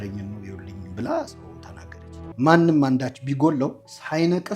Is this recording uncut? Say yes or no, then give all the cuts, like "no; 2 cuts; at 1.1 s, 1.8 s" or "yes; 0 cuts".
no; 1 cut; at 2.3 s